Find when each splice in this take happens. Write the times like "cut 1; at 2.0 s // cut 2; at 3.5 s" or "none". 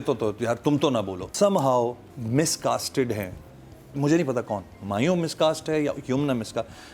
cut 1; at 1.2 s // cut 2; at 2.1 s